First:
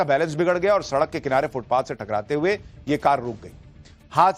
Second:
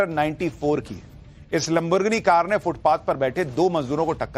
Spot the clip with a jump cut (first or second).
first